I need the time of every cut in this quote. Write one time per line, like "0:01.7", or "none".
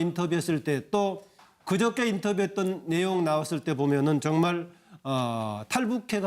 0:02.3